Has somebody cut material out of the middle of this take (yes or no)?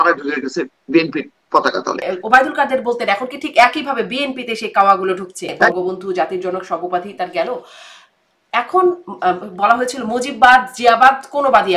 yes